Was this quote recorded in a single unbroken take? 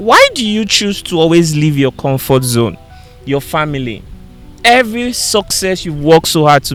yes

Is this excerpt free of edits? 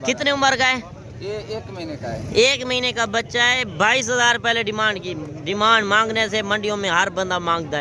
yes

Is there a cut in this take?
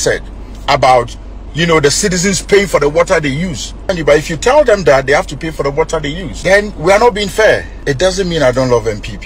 yes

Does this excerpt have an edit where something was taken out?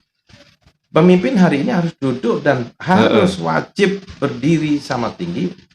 no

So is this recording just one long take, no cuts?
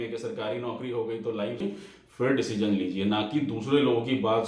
no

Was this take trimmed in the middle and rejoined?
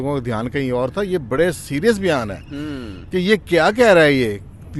no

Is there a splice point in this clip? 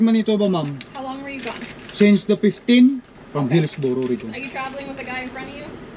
yes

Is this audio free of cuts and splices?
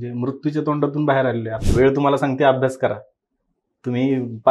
no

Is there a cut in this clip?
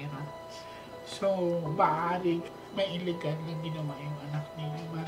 yes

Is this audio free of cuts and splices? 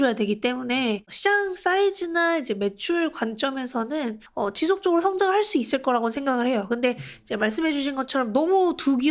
yes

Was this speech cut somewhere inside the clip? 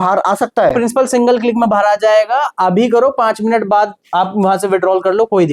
no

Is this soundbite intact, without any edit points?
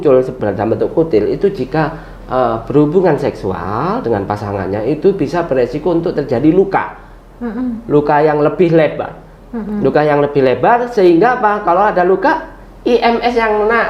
yes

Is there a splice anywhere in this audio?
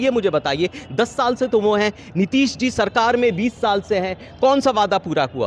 no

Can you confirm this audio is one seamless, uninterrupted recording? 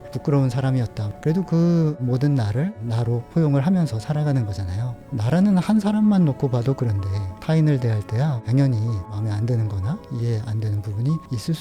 no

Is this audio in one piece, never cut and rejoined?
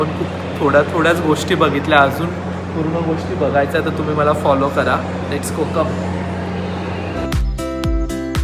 yes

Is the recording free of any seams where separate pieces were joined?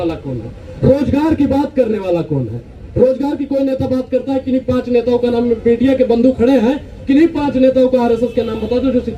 yes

